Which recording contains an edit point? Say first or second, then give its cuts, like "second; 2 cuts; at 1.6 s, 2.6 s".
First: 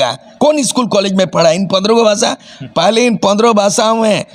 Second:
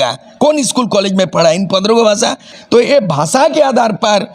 second; 1 cut; at 2.5 s